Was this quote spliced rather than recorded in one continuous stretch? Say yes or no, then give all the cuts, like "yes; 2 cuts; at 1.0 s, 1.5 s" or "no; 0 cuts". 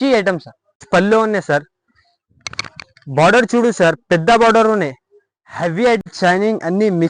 yes; 2 cuts; at 0.8 s, 6.0 s